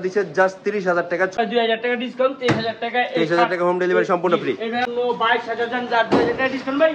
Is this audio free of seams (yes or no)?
no